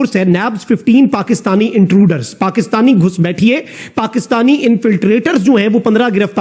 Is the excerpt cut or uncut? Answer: uncut